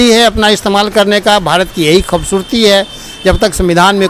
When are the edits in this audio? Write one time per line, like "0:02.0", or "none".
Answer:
none